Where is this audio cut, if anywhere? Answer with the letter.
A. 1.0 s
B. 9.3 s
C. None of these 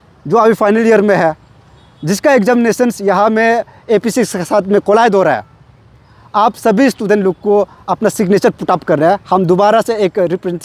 C